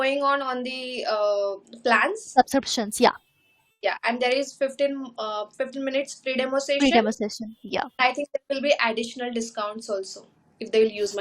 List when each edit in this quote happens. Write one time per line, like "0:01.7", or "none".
none